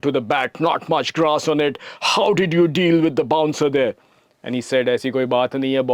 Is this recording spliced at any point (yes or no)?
no